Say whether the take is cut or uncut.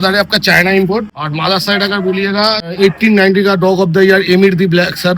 cut